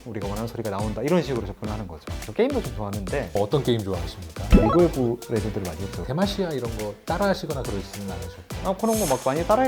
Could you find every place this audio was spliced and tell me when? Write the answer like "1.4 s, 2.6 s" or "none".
2.2 s, 8.6 s